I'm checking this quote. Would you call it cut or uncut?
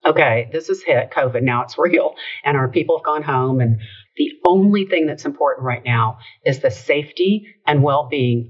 cut